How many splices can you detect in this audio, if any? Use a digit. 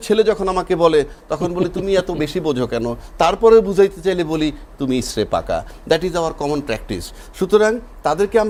0